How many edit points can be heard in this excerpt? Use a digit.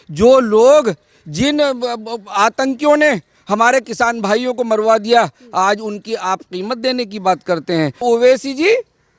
1